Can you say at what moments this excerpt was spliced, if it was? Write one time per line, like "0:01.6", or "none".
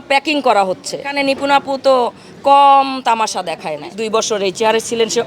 0:01.1
0:03.8